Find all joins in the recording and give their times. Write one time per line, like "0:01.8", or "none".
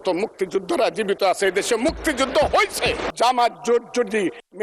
0:03.1